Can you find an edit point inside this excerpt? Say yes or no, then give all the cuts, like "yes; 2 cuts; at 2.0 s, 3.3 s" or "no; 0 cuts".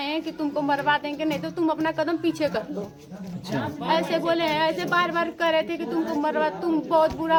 no; 0 cuts